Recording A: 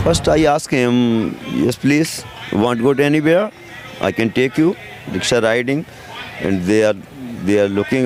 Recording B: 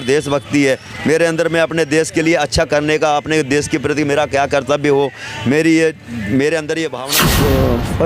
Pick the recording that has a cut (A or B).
B